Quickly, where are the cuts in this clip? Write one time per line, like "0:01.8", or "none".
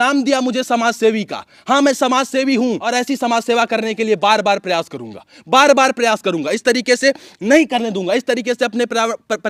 none